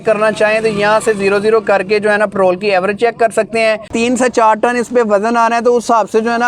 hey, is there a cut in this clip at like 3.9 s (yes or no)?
yes